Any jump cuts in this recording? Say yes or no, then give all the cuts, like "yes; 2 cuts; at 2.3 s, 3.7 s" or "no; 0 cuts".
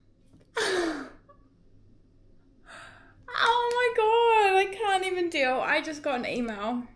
no; 0 cuts